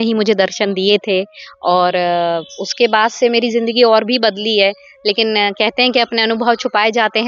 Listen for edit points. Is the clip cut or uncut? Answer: uncut